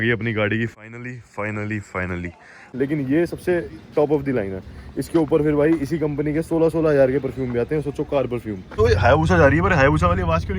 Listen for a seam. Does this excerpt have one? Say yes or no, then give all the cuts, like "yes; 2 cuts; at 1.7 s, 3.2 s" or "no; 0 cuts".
yes; 2 cuts; at 2.6 s, 8.7 s